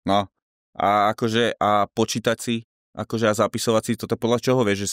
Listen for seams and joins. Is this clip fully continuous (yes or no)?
yes